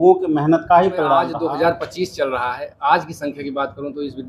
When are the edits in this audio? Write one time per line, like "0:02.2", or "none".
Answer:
0:01.3